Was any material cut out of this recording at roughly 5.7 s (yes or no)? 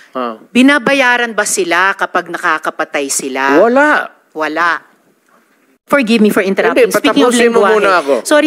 yes